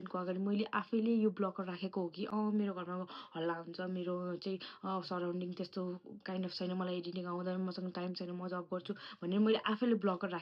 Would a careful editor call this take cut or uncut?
uncut